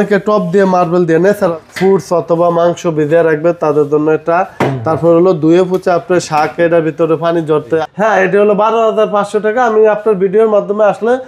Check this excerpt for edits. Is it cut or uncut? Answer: cut